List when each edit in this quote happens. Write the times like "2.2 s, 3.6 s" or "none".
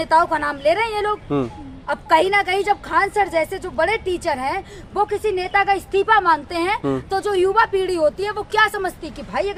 none